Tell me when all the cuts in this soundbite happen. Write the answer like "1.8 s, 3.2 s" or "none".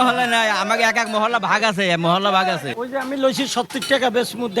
2.7 s